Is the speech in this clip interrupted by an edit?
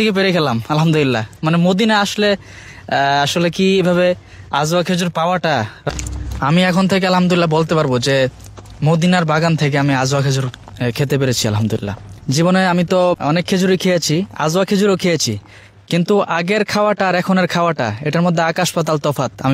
yes; 3 cuts; at 5.9 s, 12.1 s, 13.2 s

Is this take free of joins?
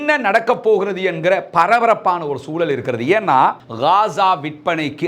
no; 1 cut; at 3.6 s

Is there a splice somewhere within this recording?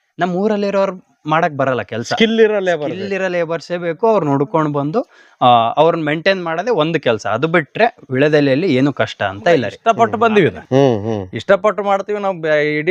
yes; 1 cut; at 9.7 s

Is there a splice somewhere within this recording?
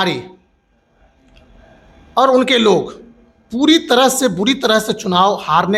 no; 0 cuts

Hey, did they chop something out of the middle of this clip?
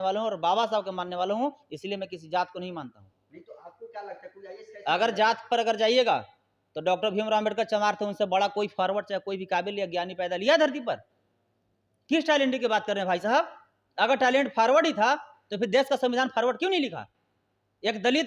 no; 0 cuts

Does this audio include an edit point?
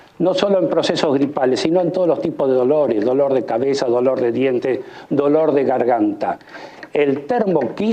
no; 0 cuts

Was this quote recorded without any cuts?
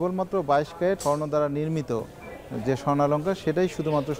no; 1 cut; at 1.0 s

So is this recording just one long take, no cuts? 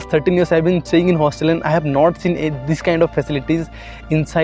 yes; 0 cuts

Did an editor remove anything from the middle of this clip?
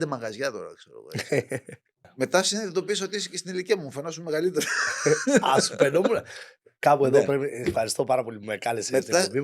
yes; 1 cut; at 2.1 s

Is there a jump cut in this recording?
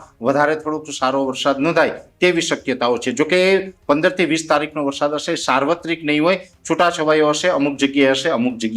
no; 0 cuts

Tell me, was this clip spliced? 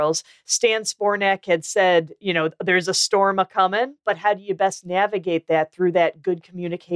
yes; 1 cut; at 4.0 s

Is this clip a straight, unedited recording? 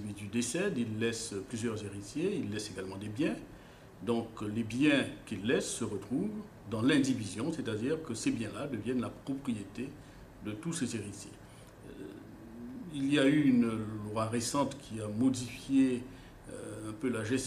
no; 1 cut; at 10.8 s

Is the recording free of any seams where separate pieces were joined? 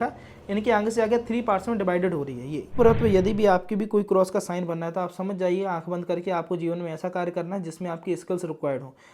no; 1 cut; at 2.8 s

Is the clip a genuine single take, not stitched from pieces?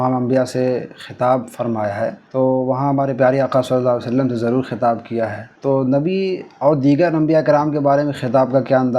no; 2 cuts; at 2.2 s, 5.5 s

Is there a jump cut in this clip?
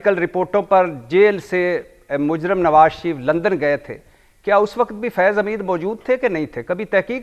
no; 0 cuts

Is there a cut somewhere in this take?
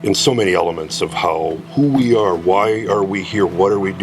yes; 1 cut; at 1.6 s

